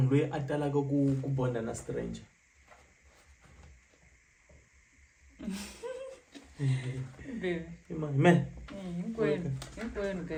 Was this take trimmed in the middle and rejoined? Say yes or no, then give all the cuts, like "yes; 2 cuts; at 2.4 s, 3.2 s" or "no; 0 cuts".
no; 0 cuts